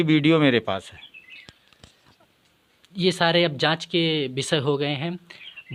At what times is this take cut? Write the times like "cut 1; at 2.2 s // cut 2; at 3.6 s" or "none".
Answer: none